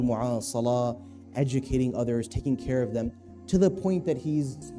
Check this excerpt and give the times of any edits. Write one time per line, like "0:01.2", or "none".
none